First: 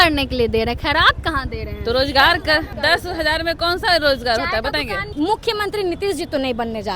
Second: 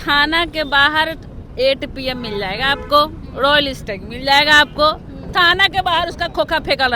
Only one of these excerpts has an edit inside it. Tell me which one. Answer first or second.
first